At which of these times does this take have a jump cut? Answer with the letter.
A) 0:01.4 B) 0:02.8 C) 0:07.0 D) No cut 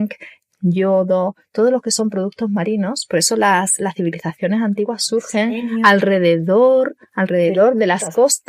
D